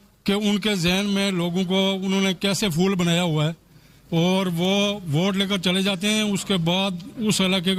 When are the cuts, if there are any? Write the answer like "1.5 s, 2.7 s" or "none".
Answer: none